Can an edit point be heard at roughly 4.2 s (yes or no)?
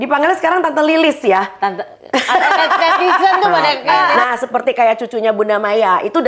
yes